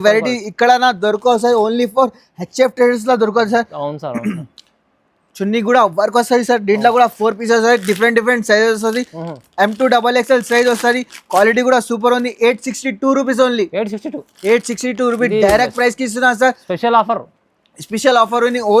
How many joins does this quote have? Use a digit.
0